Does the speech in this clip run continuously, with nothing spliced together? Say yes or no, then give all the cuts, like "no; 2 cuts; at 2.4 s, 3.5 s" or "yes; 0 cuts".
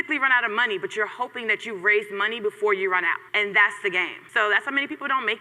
no; 2 cuts; at 3.2 s, 4.2 s